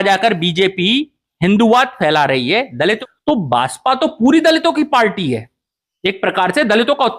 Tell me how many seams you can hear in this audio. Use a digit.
1